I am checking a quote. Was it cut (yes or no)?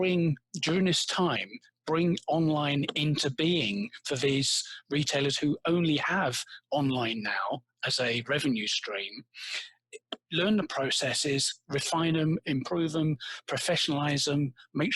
no